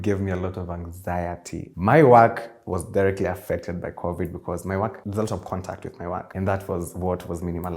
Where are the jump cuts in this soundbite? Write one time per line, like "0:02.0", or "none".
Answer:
0:01.7
0:05.0
0:06.3